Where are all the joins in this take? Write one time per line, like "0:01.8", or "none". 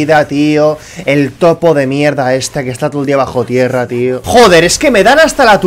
0:04.2